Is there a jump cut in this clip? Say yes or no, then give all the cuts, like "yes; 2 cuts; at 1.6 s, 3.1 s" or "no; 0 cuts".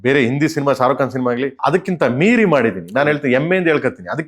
yes; 1 cut; at 1.6 s